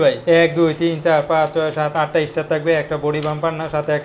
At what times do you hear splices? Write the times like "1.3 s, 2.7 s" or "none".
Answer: none